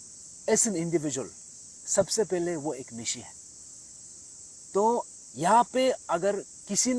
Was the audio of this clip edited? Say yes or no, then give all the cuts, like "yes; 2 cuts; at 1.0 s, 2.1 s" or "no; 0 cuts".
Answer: no; 0 cuts